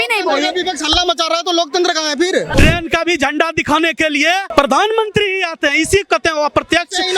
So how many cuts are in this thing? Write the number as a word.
two